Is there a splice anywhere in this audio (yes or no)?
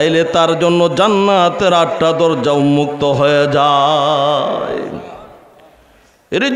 no